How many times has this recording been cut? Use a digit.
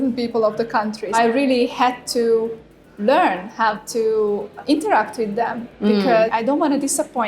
3